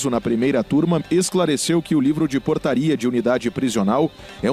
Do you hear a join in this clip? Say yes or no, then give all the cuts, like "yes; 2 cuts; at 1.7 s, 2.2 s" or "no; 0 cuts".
yes; 1 cut; at 1.0 s